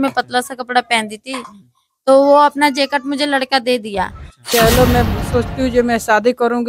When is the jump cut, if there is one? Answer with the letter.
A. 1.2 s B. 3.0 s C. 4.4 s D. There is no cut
C